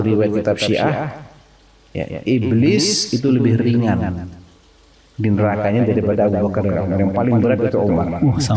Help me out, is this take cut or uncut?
uncut